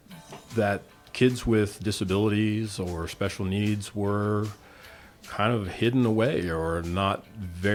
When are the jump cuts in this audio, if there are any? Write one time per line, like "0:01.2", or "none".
none

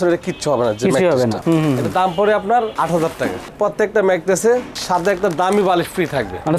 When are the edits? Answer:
0:03.5

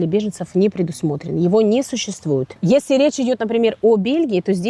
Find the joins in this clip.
0:02.5

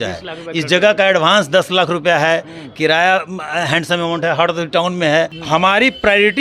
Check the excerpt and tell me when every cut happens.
0:05.4

